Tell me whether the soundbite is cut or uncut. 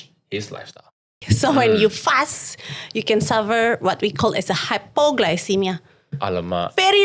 cut